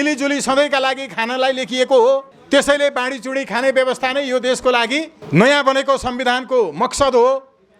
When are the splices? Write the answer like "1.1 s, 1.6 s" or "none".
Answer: 2.3 s, 5.2 s